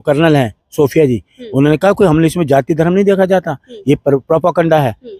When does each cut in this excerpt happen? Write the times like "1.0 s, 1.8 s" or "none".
none